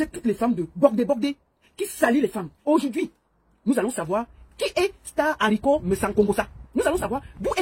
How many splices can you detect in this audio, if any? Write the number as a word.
two